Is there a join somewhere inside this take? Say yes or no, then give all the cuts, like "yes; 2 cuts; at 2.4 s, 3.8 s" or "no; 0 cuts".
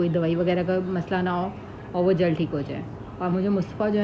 no; 0 cuts